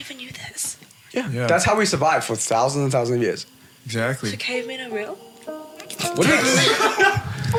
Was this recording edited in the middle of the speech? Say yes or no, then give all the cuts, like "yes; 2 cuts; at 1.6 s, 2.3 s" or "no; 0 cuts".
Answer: no; 0 cuts